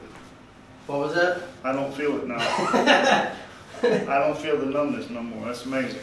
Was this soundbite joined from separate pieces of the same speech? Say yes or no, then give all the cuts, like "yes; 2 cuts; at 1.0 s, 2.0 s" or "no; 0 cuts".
no; 0 cuts